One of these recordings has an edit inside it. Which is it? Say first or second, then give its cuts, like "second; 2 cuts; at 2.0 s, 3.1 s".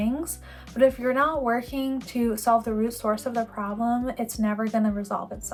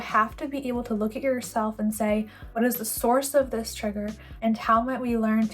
second; 2 cuts; at 2.4 s, 4.2 s